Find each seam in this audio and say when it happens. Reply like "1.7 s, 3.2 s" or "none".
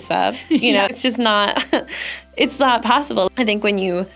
0.9 s, 3.3 s